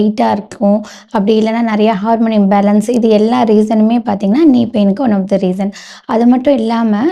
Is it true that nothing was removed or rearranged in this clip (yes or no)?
yes